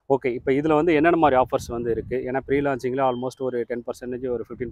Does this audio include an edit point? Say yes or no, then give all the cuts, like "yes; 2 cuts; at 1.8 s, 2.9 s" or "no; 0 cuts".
no; 0 cuts